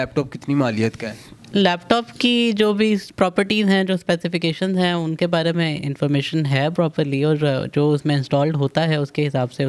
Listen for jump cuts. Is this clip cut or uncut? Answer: uncut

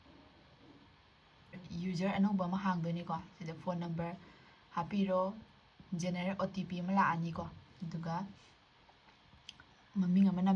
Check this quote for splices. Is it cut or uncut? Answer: cut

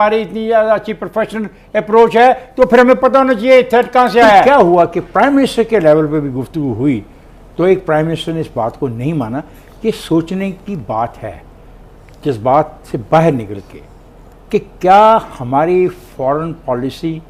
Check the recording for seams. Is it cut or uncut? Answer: uncut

